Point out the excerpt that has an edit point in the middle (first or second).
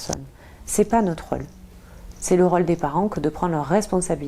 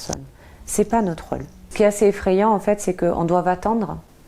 second